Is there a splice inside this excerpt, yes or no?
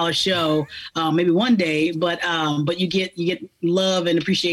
no